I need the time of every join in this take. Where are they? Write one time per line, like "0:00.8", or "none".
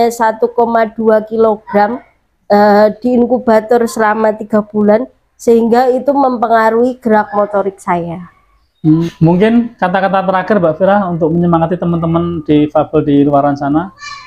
0:09.1

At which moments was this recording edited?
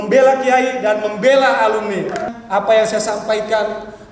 0:02.3

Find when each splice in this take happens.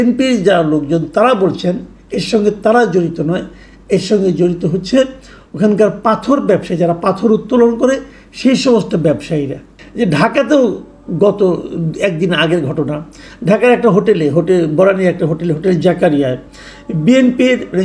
0:09.8

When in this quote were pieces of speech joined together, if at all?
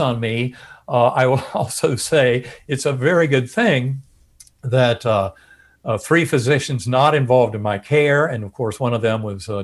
none

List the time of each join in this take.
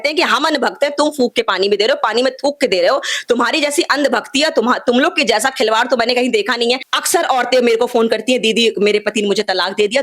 0:06.9

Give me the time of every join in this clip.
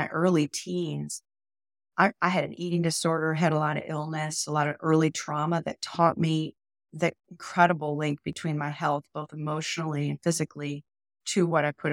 none

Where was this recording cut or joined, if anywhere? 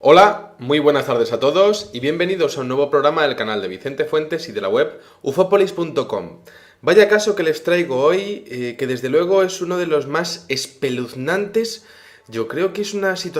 none

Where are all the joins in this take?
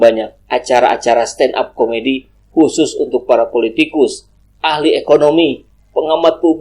none

